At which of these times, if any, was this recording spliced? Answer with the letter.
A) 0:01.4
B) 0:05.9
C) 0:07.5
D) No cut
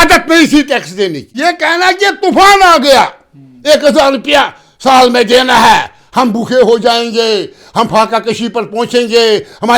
A